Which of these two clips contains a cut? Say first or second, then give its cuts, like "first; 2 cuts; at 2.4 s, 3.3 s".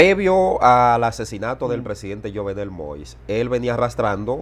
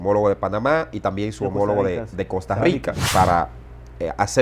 second; 1 cut; at 3.0 s